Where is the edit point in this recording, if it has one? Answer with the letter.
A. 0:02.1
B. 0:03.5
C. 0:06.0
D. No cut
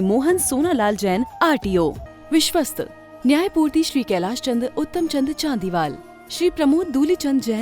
A